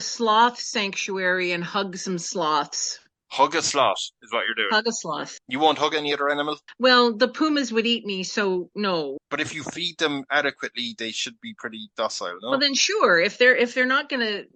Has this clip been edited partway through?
no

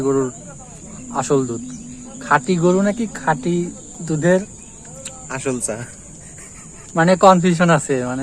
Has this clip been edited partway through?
no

